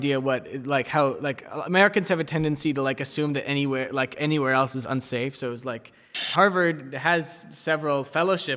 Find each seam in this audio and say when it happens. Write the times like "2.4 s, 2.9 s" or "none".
6.1 s